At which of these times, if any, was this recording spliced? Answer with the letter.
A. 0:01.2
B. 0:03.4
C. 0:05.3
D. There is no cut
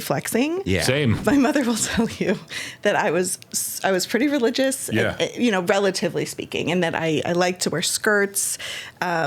A